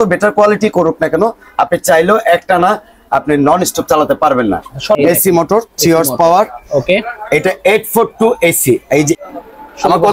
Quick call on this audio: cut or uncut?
cut